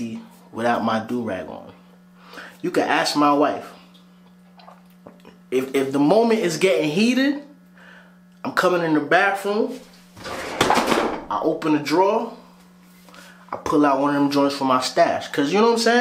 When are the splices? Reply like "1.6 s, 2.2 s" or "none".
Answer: none